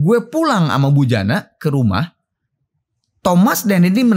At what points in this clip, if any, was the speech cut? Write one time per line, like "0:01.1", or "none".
none